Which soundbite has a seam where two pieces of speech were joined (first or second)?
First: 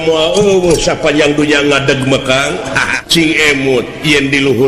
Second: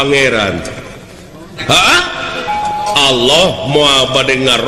first